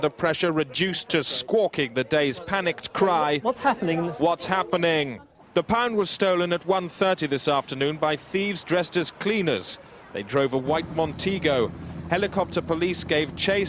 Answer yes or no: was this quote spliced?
yes